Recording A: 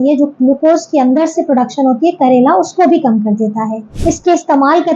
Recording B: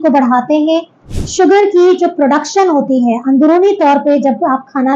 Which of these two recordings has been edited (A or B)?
A